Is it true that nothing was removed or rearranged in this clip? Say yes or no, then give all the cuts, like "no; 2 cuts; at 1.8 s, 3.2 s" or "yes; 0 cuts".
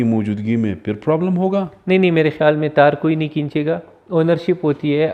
yes; 0 cuts